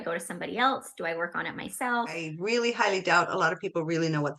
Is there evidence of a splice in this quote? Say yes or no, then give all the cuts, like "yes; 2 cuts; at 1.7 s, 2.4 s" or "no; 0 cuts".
yes; 1 cut; at 2.3 s